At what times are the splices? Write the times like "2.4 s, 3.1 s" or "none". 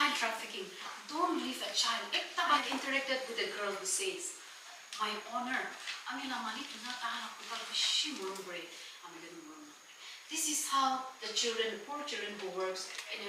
2.6 s